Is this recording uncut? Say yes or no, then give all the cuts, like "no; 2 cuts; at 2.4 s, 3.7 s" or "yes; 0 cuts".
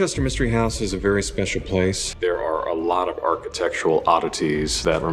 no; 1 cut; at 2.1 s